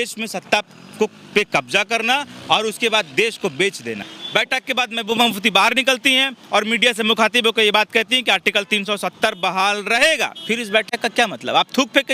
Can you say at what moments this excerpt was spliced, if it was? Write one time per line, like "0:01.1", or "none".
0:04.1